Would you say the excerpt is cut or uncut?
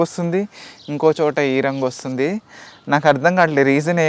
uncut